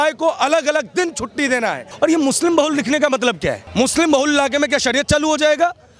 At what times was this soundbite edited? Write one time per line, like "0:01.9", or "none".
0:01.9
0:03.6